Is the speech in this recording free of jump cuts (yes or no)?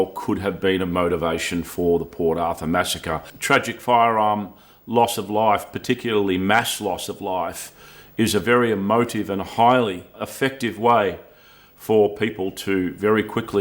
no